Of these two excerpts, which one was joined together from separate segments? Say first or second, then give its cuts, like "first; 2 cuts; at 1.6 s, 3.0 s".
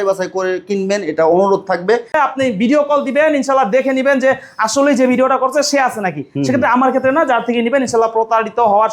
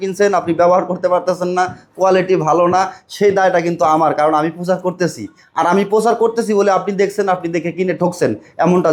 first; 1 cut; at 2.1 s